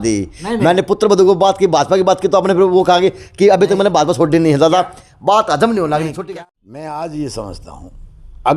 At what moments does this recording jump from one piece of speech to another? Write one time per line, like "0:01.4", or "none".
0:06.1